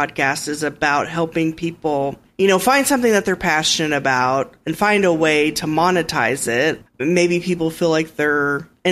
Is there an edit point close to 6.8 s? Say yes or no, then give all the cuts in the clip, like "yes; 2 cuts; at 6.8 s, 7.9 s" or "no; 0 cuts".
yes; 2 cuts; at 2.2 s, 6.8 s